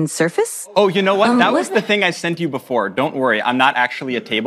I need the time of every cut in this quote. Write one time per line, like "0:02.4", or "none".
none

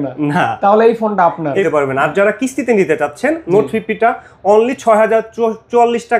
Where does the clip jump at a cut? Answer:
0:01.6

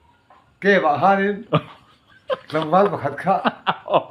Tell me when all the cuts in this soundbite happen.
none

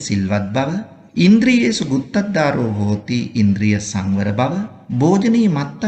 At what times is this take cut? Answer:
0:01.0
0:04.8

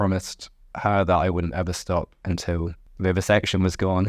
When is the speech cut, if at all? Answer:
0:02.8

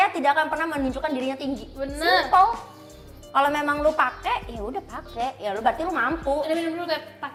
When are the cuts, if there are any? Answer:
none

